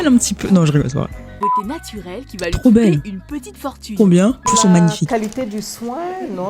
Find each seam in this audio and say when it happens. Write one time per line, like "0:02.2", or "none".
0:01.4
0:04.5